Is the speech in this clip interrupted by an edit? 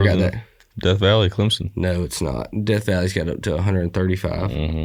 no; 0 cuts

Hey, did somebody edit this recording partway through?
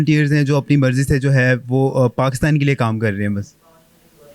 no; 0 cuts

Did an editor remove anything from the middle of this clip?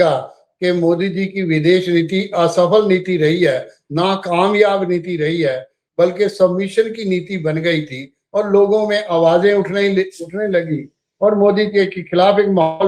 no; 0 cuts

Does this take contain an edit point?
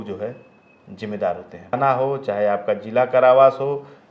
yes; 1 cut; at 1.8 s

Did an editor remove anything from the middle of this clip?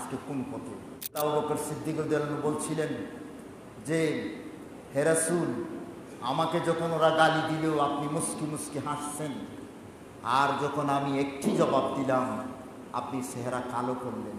yes; 1 cut; at 1.2 s

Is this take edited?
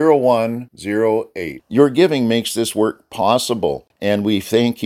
yes; 1 cut; at 3.9 s

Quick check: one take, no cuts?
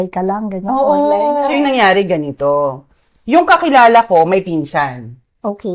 yes; 0 cuts

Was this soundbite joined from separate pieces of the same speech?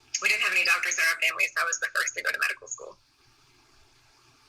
no; 0 cuts

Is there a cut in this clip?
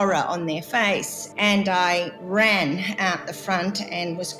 yes; 2 cuts; at 1.1 s, 2.1 s

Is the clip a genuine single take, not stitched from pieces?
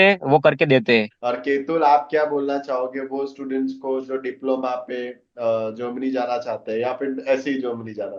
no; 1 cut; at 1.1 s

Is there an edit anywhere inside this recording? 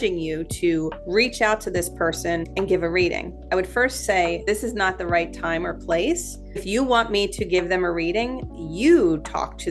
yes; 4 cuts; at 1.0 s, 2.5 s, 4.4 s, 6.6 s

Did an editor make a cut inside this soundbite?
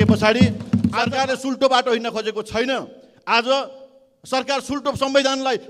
yes; 1 cut; at 1.0 s

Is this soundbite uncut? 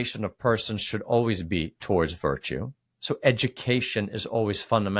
yes; 0 cuts

